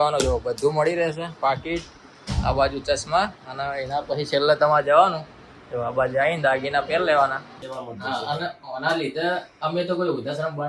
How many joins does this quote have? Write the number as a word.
one